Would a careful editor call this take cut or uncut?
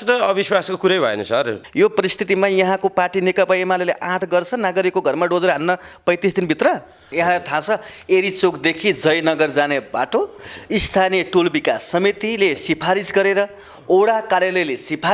cut